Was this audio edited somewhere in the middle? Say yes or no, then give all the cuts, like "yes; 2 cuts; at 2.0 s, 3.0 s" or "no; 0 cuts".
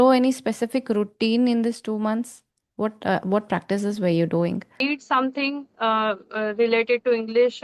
yes; 1 cut; at 4.8 s